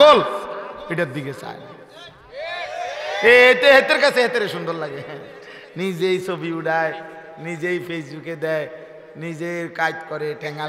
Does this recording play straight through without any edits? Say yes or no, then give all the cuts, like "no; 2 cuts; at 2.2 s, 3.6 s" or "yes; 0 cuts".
yes; 0 cuts